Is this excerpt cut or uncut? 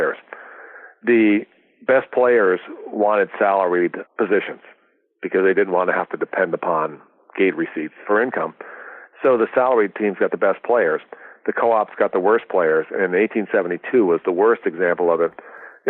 cut